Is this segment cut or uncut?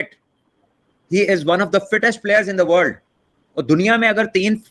uncut